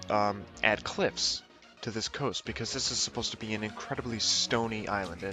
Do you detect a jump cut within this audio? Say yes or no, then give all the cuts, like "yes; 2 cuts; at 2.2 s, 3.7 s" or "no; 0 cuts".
yes; 1 cut; at 4.3 s